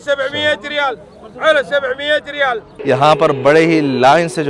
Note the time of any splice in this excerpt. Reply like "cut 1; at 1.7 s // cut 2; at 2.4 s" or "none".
cut 1; at 2.7 s